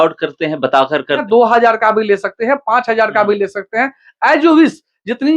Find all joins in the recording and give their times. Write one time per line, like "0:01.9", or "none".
0:01.2